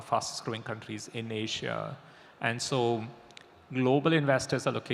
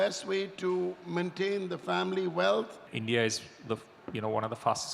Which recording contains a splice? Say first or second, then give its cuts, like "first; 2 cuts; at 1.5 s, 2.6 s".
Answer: second; 1 cut; at 2.8 s